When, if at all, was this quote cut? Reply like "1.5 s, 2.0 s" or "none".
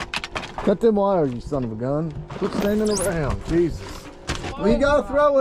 4.5 s